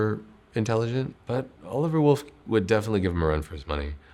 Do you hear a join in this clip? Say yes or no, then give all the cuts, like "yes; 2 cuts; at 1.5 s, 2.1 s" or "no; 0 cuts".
yes; 1 cut; at 1.1 s